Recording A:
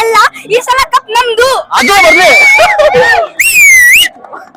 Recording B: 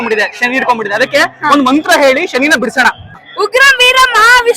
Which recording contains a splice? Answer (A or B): B